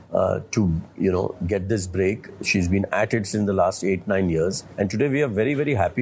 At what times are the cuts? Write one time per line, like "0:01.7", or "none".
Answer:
0:04.6